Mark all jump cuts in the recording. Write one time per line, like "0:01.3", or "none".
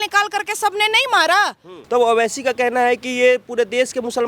0:01.7